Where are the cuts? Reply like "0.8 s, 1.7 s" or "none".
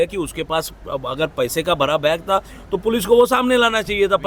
none